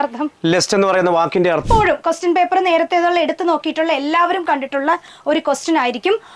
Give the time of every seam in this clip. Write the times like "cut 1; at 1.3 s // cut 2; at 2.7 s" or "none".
cut 1; at 1.6 s

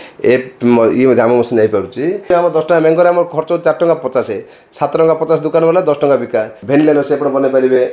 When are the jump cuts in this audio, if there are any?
cut 1; at 2.3 s // cut 2; at 6.5 s

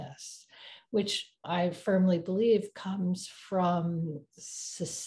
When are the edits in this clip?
cut 1; at 1.4 s

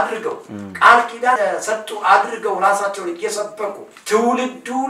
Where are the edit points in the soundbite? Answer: cut 1; at 1.4 s // cut 2; at 3.9 s

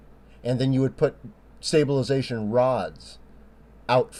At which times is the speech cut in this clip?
none

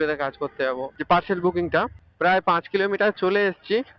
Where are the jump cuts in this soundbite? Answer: cut 1; at 0.9 s

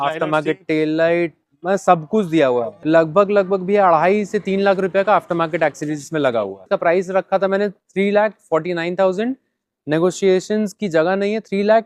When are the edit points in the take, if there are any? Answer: cut 1; at 2.8 s // cut 2; at 6.6 s

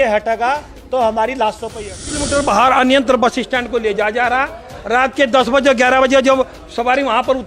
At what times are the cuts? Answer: cut 1; at 2.3 s

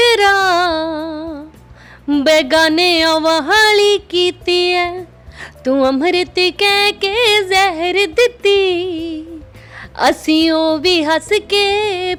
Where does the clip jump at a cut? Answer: none

